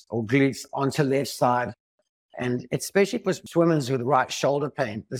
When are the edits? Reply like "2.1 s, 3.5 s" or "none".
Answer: 3.4 s